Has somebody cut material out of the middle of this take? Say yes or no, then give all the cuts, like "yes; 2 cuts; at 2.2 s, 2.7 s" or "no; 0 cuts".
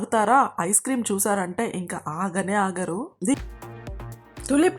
yes; 1 cut; at 3.4 s